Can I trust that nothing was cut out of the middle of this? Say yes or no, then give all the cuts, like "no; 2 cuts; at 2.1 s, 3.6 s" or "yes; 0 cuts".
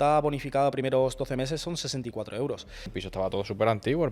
no; 1 cut; at 2.9 s